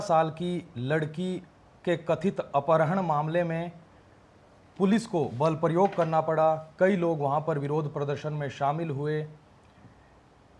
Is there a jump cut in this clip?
no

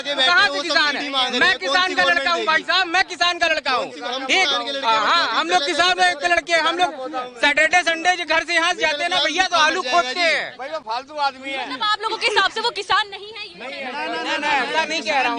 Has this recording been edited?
no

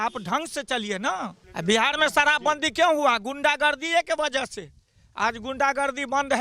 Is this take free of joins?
no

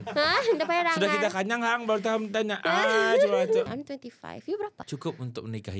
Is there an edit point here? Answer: yes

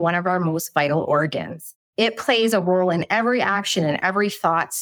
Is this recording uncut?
yes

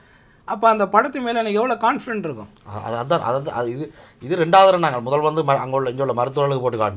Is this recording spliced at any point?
no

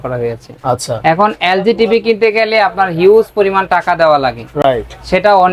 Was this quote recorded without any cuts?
yes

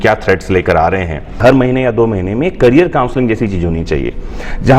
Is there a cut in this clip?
yes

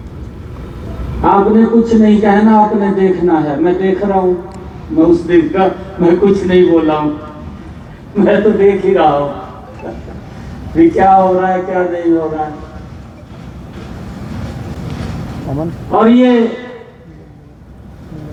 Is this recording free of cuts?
yes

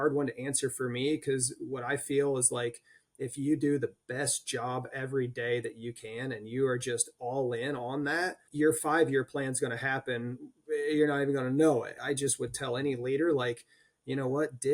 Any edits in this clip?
yes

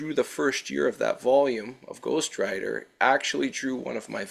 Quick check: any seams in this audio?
no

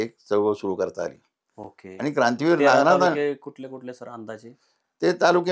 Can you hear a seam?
no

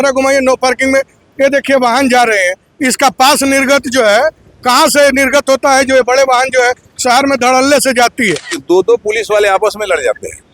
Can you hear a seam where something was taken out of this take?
yes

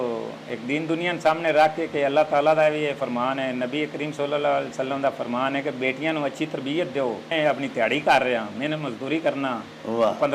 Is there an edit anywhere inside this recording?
yes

